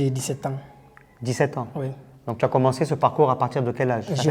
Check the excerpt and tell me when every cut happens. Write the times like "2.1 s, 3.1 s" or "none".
none